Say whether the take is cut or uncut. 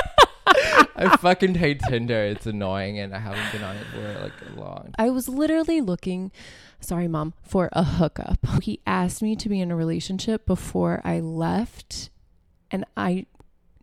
cut